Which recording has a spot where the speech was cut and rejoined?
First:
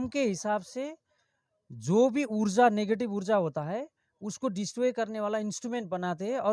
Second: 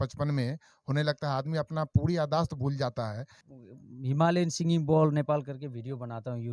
second; 1 cut; at 3.4 s

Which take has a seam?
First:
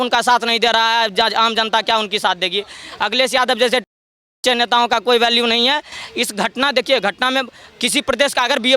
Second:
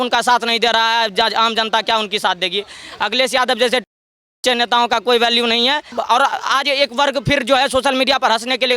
second; 1 cut; at 6.0 s

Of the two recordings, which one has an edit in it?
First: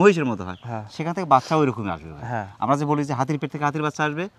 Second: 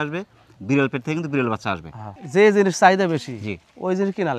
second; 1 cut; at 2.1 s

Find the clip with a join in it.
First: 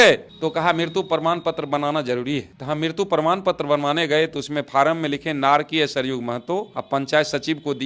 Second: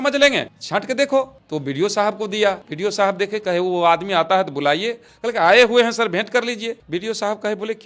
second; 2 cuts; at 2.7 s, 6.8 s

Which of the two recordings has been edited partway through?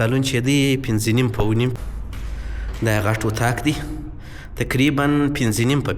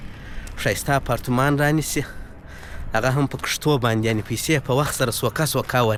first; 1 cut; at 1.8 s

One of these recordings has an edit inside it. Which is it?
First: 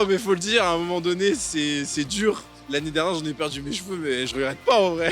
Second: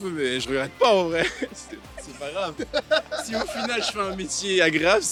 first; 1 cut; at 2.5 s

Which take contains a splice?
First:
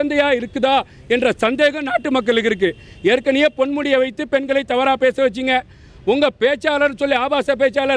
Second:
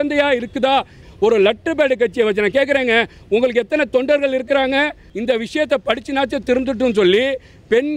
second; 2 cuts; at 1.0 s, 5.0 s

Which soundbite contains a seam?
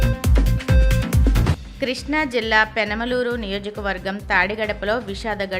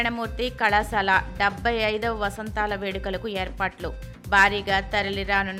first; 1 cut; at 1.5 s

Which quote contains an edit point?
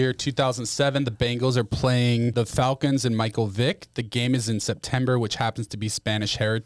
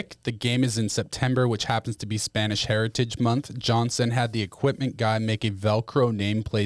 first; 1 cut; at 2.3 s

